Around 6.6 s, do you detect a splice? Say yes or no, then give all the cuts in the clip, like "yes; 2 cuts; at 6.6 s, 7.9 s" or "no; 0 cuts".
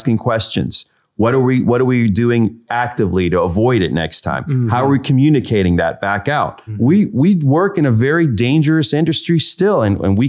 yes; 1 cut; at 6.6 s